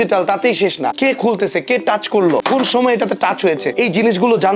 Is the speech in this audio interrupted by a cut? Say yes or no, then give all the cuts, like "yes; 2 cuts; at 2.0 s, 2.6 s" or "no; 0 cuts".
yes; 3 cuts; at 0.9 s, 2.4 s, 3.7 s